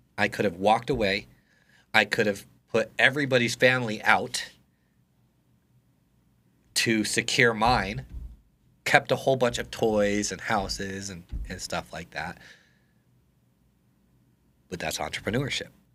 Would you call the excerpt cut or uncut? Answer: uncut